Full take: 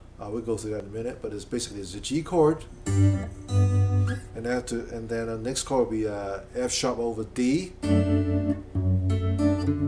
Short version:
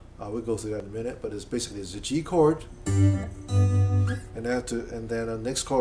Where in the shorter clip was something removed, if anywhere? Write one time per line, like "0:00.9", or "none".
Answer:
none